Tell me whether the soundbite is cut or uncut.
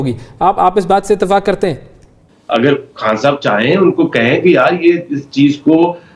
cut